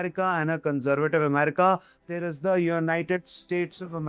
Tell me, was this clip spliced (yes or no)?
no